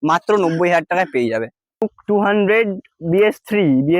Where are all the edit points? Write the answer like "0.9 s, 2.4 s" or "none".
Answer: 1.8 s